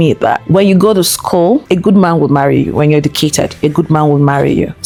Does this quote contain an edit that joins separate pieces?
no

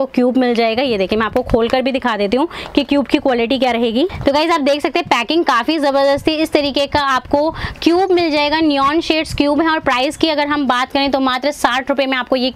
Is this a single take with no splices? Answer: yes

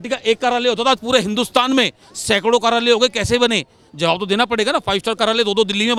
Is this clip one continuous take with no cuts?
yes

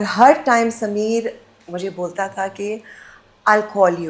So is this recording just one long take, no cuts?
yes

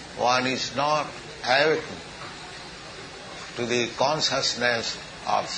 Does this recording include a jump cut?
yes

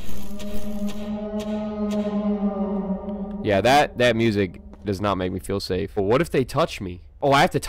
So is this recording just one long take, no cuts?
no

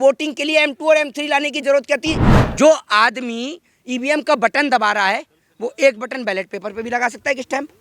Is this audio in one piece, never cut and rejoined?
no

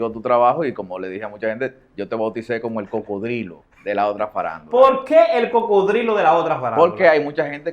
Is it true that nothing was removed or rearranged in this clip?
no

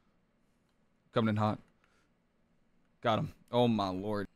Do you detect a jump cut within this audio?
no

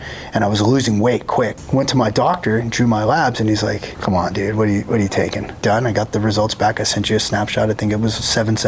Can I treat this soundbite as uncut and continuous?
no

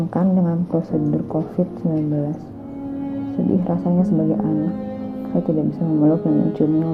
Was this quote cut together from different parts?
no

